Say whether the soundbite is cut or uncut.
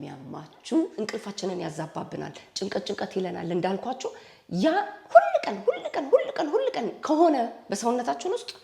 cut